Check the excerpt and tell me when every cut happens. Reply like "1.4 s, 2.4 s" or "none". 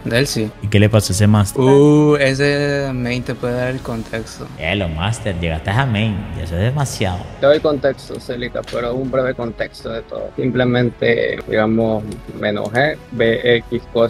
4.5 s, 7.3 s, 11.4 s